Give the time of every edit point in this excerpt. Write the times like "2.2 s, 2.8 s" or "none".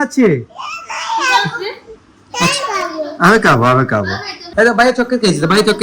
4.3 s

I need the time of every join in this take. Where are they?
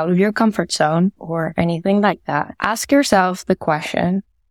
1.2 s, 2.5 s

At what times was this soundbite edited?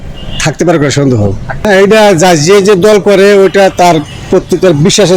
1.6 s

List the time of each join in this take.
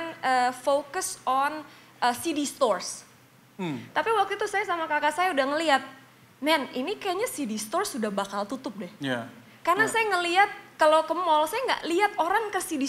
none

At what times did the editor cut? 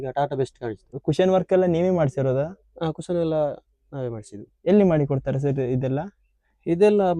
0.9 s

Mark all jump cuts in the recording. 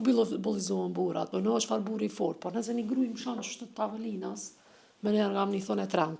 1.3 s

